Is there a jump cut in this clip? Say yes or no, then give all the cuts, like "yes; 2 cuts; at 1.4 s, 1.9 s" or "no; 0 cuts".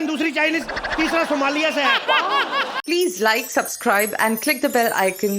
yes; 1 cut; at 2.8 s